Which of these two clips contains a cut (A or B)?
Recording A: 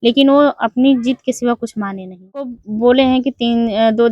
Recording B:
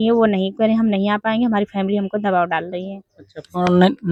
A